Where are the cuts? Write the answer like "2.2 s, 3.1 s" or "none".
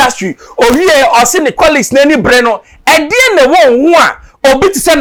none